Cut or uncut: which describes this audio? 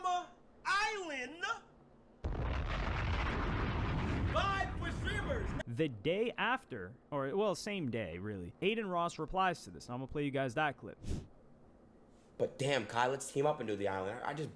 cut